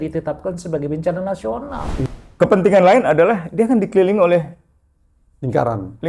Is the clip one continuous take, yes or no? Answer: no